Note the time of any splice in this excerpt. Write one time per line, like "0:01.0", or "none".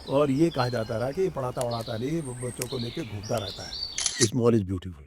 0:04.1